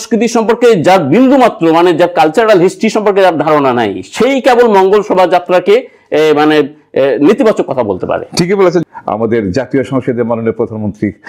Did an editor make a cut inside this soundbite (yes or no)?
yes